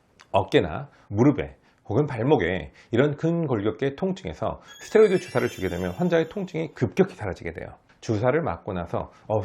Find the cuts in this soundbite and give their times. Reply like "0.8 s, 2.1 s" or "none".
1.0 s